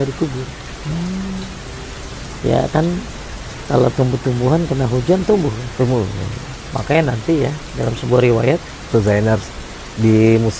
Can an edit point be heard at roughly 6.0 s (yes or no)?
no